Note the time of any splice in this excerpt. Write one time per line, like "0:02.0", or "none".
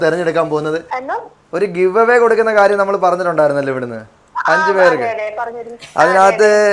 0:00.9

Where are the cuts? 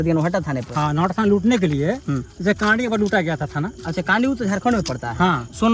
none

